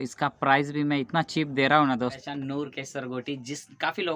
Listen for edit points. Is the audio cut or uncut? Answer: cut